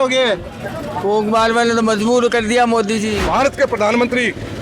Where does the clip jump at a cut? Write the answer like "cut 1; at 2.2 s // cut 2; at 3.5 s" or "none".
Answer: cut 1; at 3.2 s